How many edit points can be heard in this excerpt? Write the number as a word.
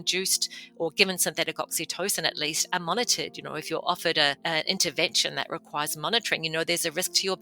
one